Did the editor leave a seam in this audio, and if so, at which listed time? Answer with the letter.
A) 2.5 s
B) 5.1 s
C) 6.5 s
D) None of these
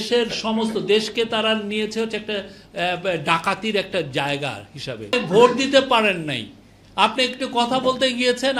B